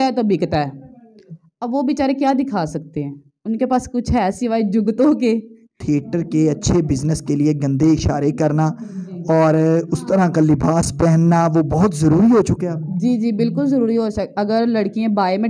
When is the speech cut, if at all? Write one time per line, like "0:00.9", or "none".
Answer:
0:05.8